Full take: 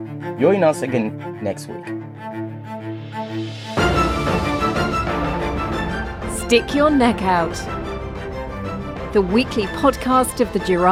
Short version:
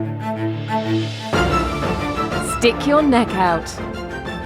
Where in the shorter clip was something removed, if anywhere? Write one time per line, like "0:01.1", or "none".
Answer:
0:02.5

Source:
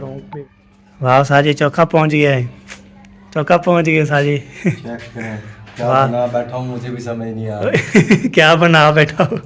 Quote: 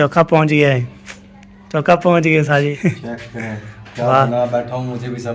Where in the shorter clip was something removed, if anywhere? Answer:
0:02.8

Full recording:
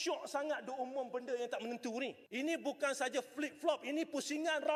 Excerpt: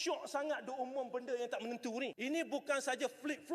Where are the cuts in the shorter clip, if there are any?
0:02.2

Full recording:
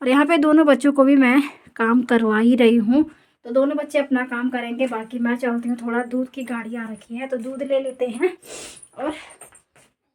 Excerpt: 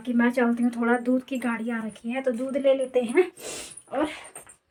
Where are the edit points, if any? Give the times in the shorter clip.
none

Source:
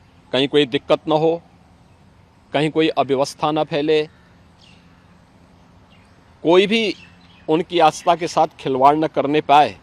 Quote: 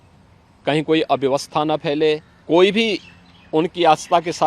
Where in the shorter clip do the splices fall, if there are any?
0:02.3

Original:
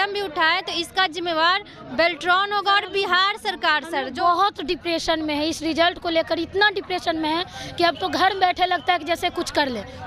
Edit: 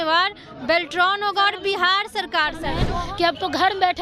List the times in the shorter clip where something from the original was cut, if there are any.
0:02.8

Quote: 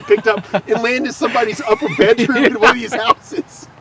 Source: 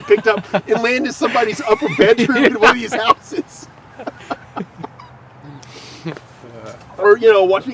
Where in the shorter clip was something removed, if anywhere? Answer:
none

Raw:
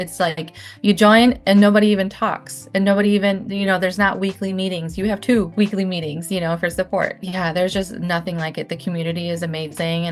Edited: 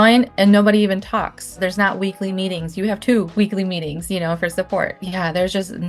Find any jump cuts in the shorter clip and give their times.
0:01.6

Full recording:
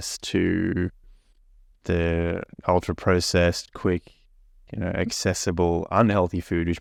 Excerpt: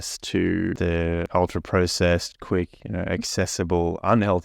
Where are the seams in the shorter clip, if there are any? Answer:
0:01.2
0:02.8

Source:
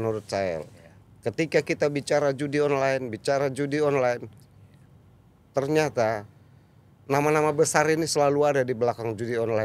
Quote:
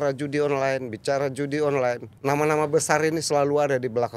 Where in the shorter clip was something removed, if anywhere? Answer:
0:02.1

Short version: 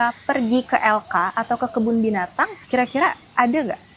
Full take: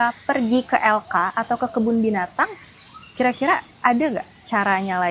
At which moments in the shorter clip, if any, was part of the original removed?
0:02.6

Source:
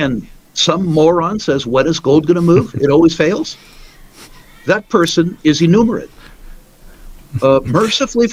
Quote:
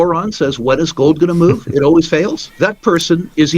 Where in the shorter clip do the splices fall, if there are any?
0:02.4

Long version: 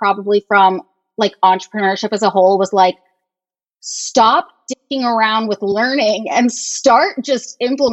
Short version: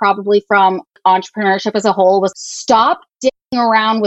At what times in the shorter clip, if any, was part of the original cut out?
0:01.0
0:02.3

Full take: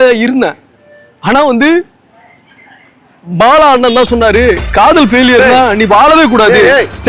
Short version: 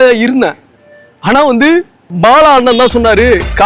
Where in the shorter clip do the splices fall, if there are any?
0:02.0

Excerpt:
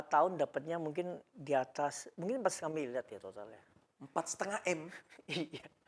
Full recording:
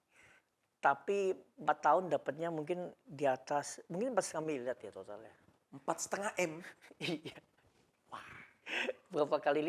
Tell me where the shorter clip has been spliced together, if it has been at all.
none

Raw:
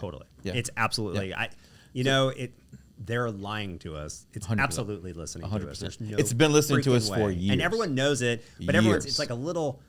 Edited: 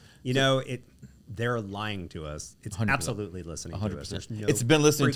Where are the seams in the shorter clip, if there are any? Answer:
none

